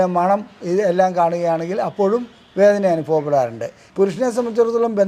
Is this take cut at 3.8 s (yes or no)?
yes